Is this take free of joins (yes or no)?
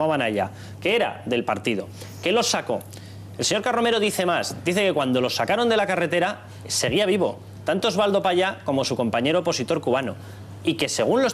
no